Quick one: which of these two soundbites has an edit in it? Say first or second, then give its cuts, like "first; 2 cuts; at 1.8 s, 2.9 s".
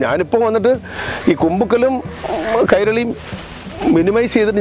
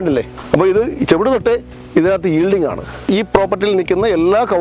second; 1 cut; at 3.0 s